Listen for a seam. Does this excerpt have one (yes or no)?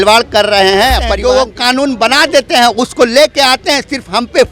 yes